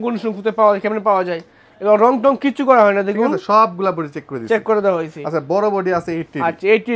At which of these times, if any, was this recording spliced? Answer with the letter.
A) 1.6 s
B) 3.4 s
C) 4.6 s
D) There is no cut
D